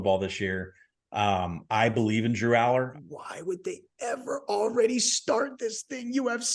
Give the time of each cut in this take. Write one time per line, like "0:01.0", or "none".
0:02.9